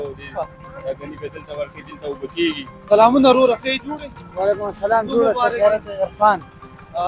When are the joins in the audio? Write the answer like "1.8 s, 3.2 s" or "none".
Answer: 2.7 s